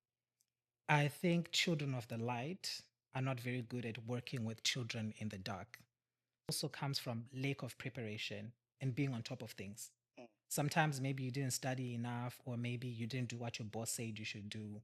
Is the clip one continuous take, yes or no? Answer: no